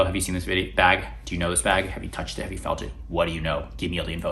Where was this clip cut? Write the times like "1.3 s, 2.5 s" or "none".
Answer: none